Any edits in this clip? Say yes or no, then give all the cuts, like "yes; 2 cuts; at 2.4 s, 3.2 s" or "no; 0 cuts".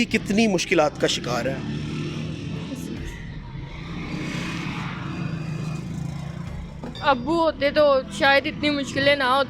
yes; 1 cut; at 6.9 s